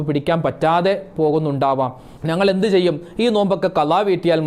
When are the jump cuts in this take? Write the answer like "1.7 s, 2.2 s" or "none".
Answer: none